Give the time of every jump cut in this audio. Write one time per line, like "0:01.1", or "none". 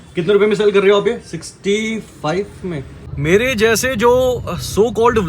0:03.0